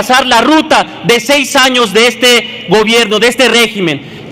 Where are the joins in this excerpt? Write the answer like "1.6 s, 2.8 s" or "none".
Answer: none